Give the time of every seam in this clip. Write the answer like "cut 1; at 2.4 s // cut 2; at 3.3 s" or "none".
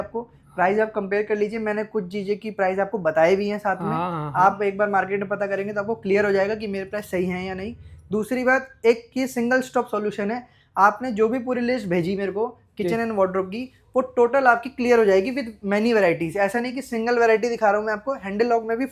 none